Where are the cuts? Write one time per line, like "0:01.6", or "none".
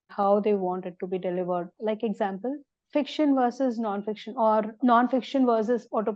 0:02.7